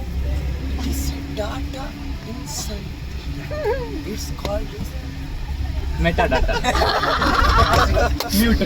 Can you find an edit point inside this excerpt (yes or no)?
yes